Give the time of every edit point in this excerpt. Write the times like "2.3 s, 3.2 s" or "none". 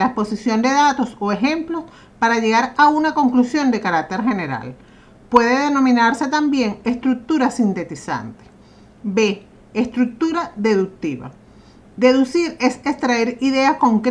3.5 s